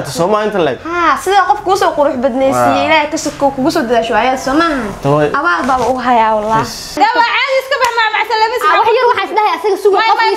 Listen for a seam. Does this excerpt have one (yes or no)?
yes